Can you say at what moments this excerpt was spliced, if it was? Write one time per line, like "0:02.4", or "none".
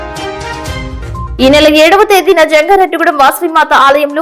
none